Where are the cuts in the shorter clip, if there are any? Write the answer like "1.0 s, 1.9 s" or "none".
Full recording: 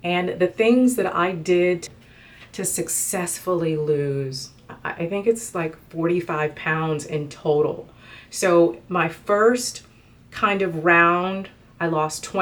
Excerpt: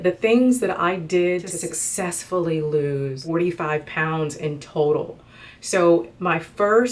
1.5 s, 3.2 s